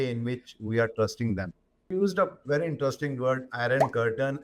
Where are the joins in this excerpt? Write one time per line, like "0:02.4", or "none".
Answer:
0:01.9